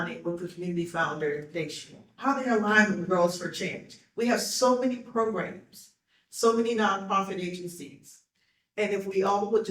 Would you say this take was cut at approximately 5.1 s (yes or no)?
no